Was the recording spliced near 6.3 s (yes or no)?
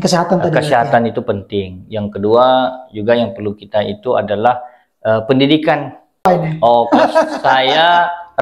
yes